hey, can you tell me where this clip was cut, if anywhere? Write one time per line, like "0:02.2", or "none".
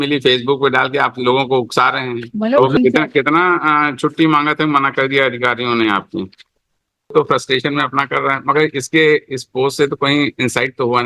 0:02.8
0:07.1